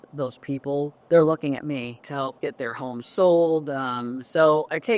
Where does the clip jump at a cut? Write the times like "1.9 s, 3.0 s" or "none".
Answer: 1.0 s, 2.0 s